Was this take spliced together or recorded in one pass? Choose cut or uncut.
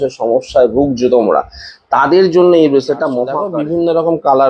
cut